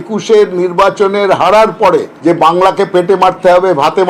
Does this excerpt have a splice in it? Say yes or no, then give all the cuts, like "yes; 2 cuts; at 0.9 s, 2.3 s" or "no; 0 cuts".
yes; 1 cut; at 2.1 s